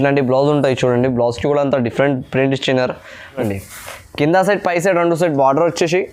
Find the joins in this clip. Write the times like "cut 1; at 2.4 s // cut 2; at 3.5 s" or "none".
cut 1; at 3.4 s